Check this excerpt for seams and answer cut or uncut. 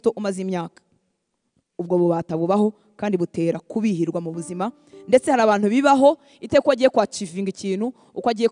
uncut